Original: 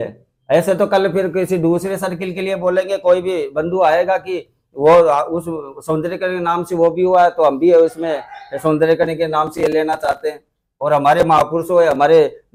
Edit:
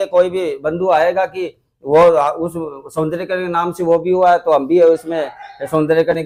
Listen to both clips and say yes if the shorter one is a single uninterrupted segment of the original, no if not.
yes